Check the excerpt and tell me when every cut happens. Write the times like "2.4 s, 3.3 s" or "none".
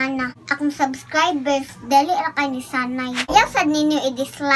3.3 s

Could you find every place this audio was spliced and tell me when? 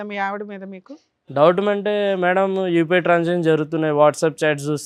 none

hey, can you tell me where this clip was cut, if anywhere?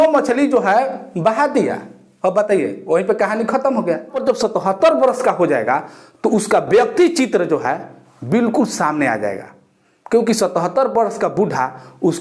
4.2 s

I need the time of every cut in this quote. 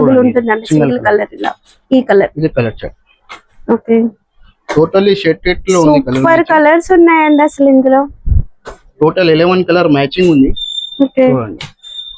none

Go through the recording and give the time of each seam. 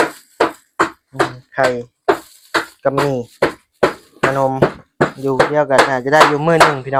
none

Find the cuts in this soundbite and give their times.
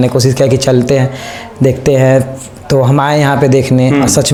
none

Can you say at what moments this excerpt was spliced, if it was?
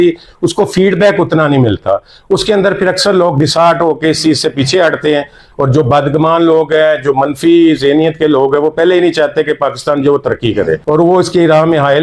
none

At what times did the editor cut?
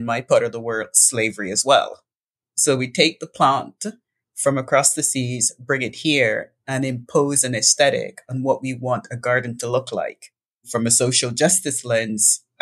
10.6 s

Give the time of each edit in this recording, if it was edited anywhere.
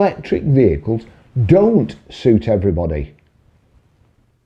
none

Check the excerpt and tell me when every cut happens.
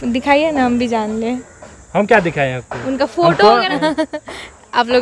3.7 s

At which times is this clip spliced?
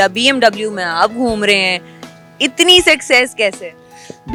none

